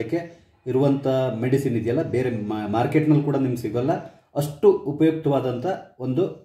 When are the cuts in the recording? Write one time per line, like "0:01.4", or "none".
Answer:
none